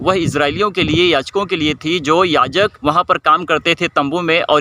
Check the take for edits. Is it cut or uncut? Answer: cut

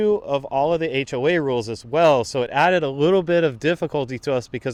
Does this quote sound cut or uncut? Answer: uncut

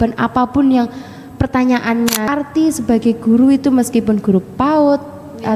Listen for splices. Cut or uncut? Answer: cut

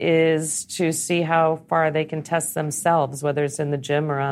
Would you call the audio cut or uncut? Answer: uncut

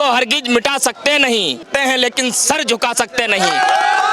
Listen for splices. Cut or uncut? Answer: cut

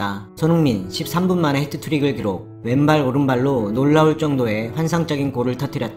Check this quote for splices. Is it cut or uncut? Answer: uncut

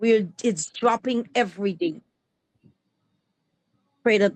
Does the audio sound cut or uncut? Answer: uncut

